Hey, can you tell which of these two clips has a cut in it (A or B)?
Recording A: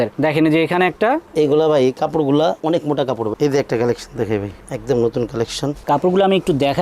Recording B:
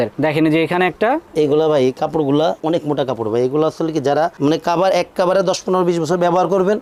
A